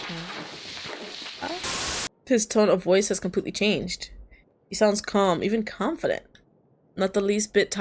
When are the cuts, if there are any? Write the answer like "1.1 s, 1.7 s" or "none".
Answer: 1.7 s